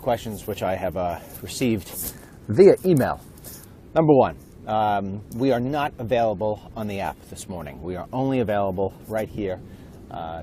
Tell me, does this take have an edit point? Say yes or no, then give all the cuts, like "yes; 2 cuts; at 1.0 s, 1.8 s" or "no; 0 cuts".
yes; 1 cut; at 8.1 s